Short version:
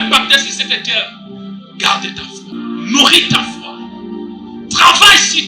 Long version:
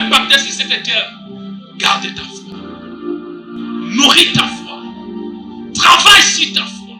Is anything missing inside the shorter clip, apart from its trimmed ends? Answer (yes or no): yes